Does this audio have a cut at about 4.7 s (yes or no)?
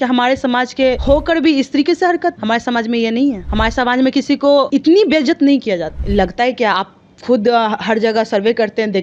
yes